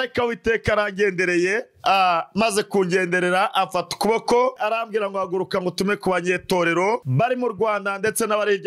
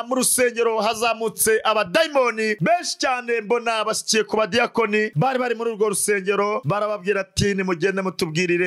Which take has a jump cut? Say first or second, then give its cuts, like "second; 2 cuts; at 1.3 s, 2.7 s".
first; 1 cut; at 4.6 s